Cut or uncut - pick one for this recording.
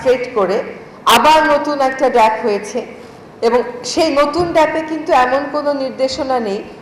uncut